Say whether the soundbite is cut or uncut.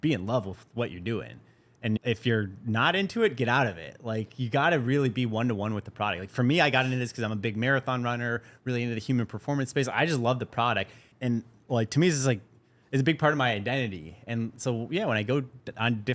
cut